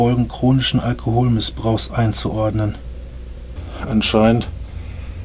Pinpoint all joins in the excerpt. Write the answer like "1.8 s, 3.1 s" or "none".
none